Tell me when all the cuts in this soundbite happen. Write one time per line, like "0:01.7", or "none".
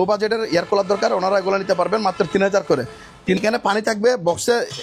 0:03.4